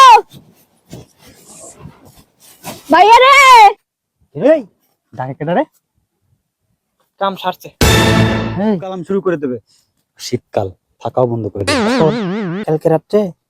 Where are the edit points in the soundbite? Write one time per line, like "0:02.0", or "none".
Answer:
0:09.0